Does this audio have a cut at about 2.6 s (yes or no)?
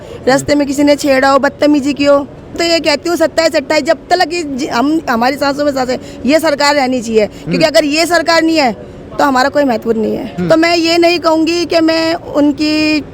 yes